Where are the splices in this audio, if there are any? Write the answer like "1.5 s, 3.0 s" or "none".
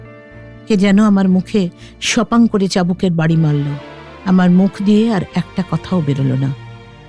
3.8 s